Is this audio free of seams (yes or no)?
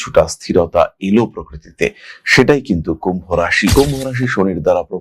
no